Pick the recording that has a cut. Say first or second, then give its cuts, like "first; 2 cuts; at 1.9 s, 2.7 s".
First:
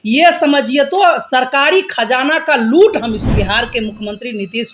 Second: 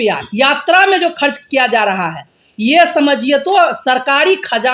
first; 1 cut; at 3.2 s